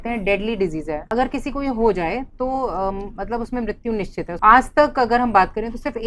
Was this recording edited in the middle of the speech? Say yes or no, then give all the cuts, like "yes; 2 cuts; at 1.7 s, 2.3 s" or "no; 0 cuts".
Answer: yes; 2 cuts; at 1.1 s, 4.3 s